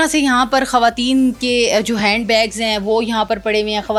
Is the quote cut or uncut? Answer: uncut